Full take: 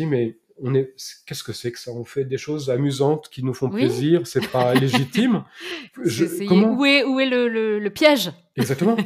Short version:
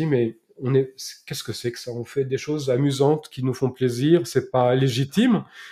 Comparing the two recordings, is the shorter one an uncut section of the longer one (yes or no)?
yes